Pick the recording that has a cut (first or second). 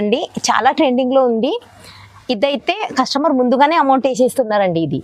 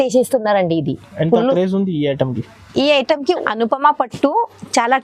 second